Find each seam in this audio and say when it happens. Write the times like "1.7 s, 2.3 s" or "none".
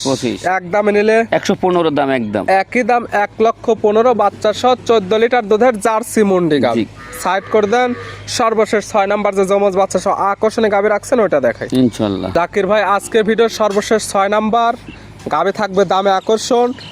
none